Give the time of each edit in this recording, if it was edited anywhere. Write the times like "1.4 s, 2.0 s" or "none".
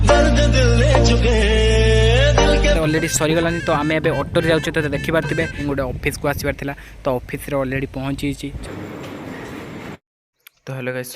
2.8 s, 5.6 s, 8.6 s